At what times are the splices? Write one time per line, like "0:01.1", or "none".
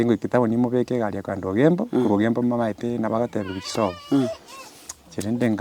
none